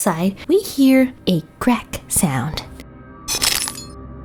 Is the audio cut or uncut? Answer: uncut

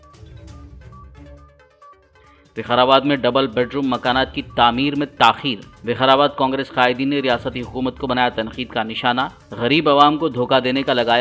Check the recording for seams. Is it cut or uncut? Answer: uncut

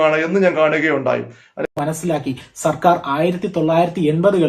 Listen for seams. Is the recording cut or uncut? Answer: cut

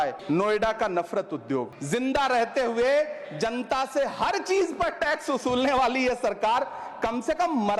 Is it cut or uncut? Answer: cut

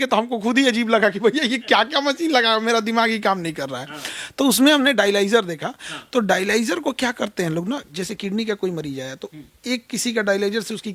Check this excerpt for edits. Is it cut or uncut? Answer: uncut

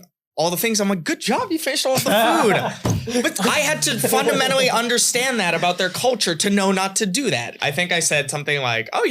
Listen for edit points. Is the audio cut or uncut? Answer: cut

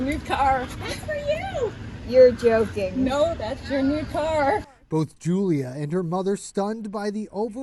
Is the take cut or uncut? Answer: uncut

